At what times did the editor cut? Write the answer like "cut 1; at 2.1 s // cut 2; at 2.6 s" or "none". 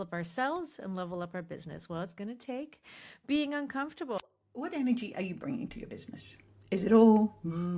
cut 1; at 4.2 s